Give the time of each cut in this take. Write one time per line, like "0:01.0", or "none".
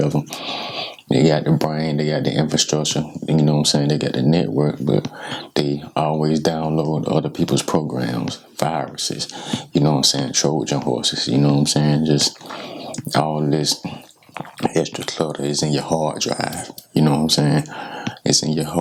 none